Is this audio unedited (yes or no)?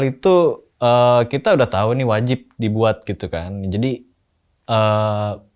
yes